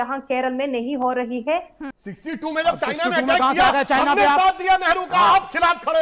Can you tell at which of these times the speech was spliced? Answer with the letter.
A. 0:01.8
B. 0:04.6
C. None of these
A